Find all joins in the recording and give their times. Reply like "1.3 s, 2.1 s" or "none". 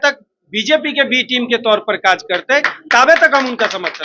none

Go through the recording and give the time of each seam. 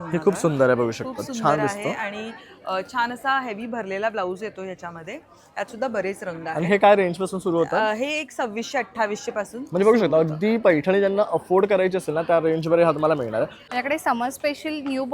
13.6 s

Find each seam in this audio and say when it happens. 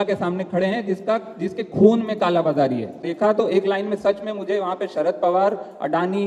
3.0 s

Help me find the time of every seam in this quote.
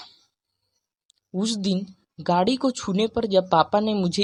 none

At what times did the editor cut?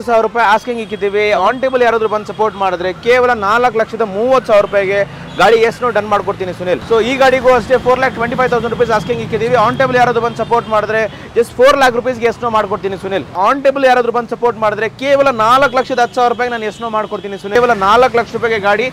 6.8 s, 13.4 s, 17.5 s

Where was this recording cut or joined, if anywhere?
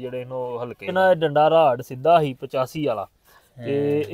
0.9 s

